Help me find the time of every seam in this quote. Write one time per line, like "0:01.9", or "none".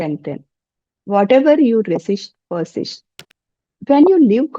0:03.2